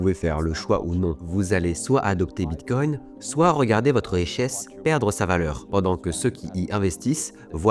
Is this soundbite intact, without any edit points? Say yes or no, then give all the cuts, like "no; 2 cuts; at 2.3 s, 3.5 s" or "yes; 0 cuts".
yes; 0 cuts